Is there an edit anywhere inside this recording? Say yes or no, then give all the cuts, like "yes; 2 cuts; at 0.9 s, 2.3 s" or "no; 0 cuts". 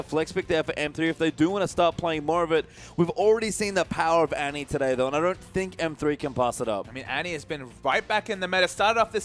yes; 1 cut; at 3.3 s